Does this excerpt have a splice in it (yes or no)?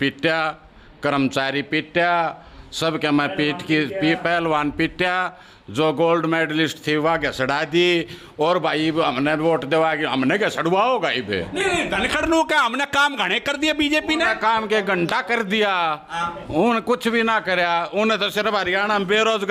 no